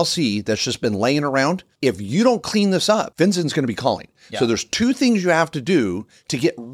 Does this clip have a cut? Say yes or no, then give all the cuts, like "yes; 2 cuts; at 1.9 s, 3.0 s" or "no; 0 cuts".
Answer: yes; 2 cuts; at 1.7 s, 3.1 s